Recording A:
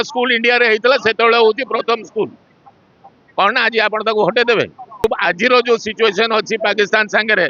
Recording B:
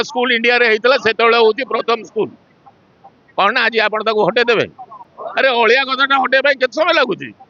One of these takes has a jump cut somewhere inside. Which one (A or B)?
A